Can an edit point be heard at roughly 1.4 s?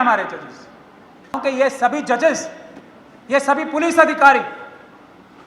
yes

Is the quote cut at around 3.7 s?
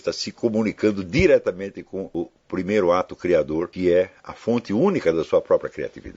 yes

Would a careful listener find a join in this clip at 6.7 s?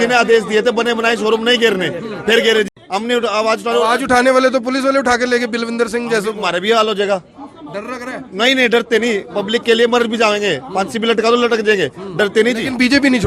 no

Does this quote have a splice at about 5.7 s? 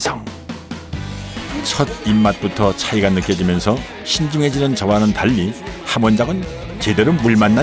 no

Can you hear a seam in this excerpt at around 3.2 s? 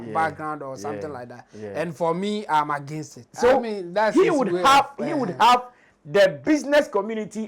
yes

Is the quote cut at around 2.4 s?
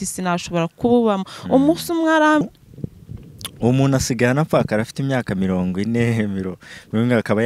yes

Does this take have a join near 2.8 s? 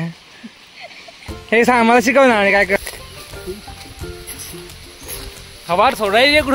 yes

